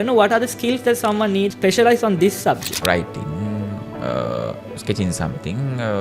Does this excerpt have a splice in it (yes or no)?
yes